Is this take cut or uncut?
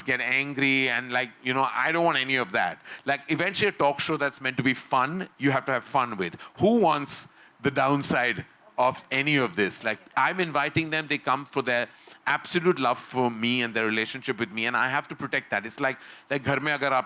uncut